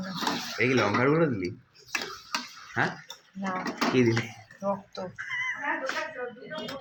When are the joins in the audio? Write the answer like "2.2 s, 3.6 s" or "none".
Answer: none